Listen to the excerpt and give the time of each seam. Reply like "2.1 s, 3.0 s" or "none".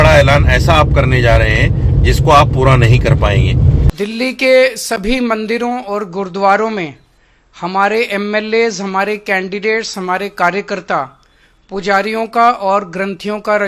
3.9 s

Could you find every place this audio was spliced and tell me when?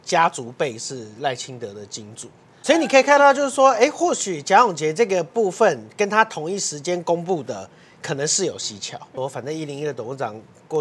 2.6 s, 9.1 s

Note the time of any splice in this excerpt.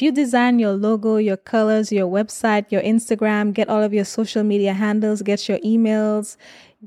none

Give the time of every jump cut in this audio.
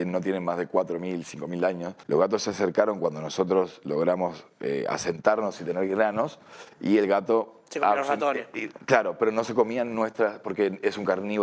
1.9 s

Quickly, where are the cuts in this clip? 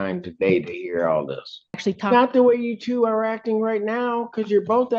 1.8 s

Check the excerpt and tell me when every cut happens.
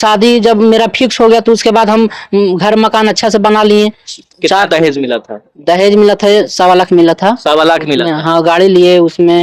4.1 s

